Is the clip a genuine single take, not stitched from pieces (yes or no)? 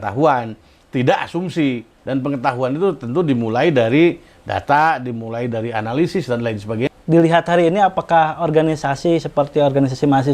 no